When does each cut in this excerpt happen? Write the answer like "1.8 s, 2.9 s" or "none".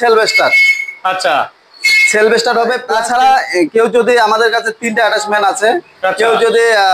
2.9 s